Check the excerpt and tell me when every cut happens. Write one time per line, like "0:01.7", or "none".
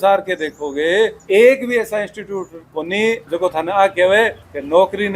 0:01.2
0:03.2